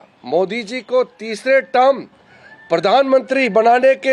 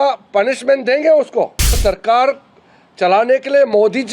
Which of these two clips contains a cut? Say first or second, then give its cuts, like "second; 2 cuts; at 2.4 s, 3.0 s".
second; 1 cut; at 1.8 s